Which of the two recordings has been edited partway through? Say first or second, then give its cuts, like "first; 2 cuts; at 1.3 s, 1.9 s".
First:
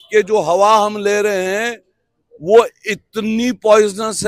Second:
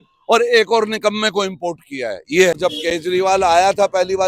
second; 1 cut; at 2.5 s